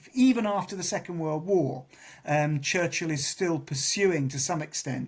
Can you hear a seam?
no; 0 cuts

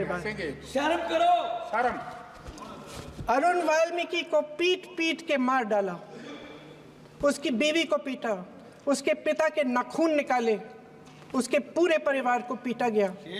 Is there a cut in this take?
no; 0 cuts

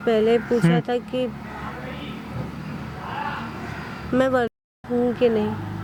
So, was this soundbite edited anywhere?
no; 0 cuts

